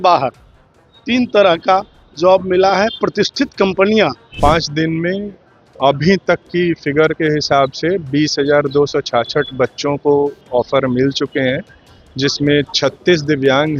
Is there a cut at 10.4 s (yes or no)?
no